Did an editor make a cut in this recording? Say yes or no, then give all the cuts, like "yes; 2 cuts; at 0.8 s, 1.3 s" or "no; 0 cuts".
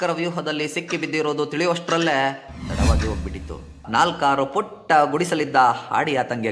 yes; 1 cut; at 3.8 s